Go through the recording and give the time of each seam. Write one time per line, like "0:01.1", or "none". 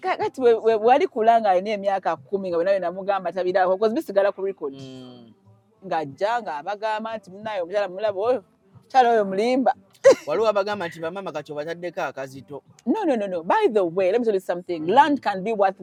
none